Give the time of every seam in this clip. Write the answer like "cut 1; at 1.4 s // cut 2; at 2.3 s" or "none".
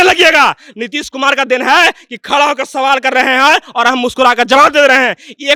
none